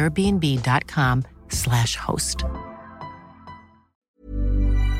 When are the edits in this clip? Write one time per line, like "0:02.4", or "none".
0:04.1